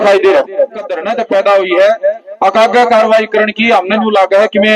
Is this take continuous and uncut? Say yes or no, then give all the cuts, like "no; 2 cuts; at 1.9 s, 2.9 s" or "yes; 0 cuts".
no; 1 cut; at 1.0 s